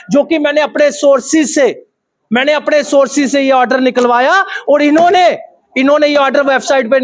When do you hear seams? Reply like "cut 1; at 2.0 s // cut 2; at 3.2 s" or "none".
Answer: none